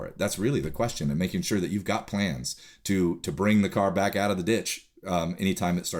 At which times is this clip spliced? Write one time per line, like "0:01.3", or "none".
none